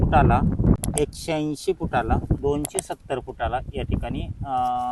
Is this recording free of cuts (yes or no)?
no